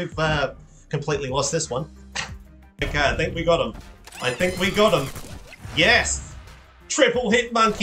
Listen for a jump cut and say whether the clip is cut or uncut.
cut